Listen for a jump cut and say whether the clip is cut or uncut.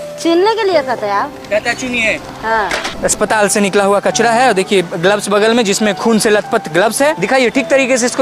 cut